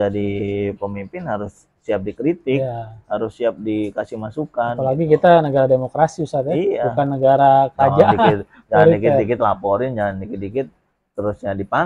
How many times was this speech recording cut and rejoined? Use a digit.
0